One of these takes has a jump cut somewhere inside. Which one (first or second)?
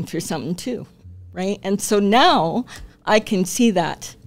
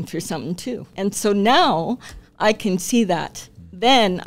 second